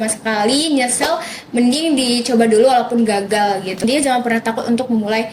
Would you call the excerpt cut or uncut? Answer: cut